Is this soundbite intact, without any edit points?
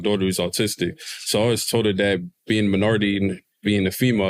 yes; 0 cuts

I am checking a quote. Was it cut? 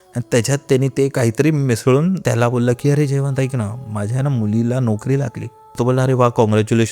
yes; 2 cuts; at 2.2 s, 5.8 s

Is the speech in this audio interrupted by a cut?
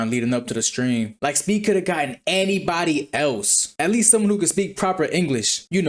no; 0 cuts

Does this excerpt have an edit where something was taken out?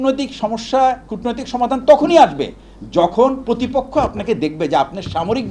no; 0 cuts

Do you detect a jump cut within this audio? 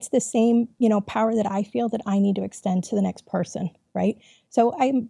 no; 0 cuts

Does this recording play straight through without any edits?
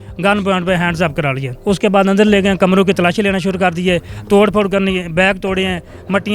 no; 1 cut; at 1.5 s

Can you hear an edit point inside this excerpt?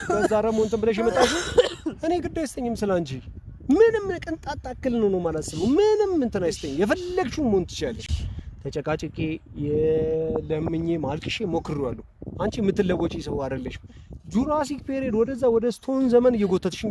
no; 0 cuts

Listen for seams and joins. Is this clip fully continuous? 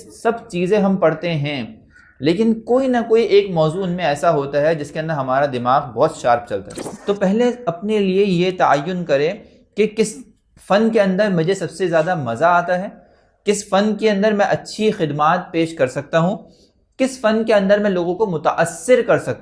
no; 1 cut; at 6.9 s

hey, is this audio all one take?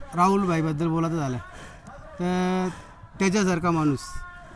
yes; 0 cuts

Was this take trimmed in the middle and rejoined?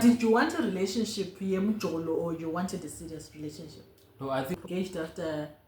yes; 1 cut; at 4.6 s

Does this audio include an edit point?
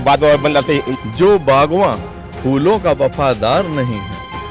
yes; 1 cut; at 0.9 s

